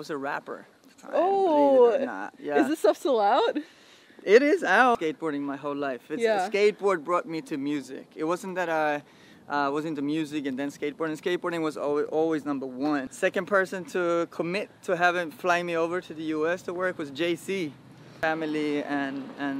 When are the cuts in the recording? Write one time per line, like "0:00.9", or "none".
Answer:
0:05.0
0:13.1
0:18.1